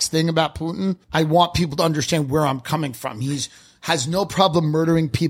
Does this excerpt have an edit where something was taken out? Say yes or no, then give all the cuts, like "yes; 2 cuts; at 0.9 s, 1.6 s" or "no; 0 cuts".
yes; 1 cut; at 1.0 s